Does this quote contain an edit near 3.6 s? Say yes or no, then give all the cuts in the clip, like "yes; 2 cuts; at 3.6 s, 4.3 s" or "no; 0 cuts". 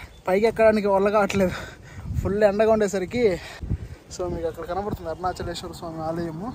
yes; 1 cut; at 3.6 s